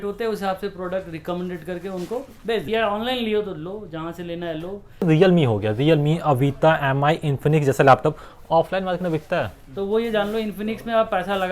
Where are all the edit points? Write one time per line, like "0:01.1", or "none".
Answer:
0:02.6
0:05.0
0:09.6